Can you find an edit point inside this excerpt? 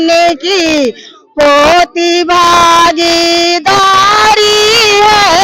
no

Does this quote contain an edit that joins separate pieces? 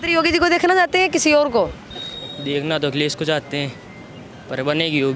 no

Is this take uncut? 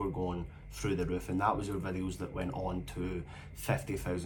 yes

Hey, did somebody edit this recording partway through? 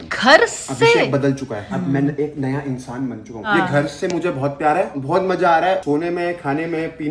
yes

